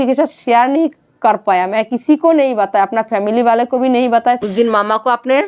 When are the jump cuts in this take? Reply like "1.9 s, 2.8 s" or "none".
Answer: 4.4 s